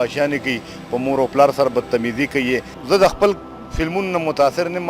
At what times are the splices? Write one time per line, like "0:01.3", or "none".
0:02.7